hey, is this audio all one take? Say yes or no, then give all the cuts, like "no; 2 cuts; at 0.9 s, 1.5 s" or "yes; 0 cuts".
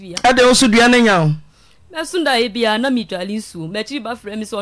yes; 0 cuts